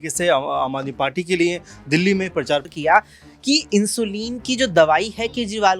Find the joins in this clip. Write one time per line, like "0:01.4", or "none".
0:02.7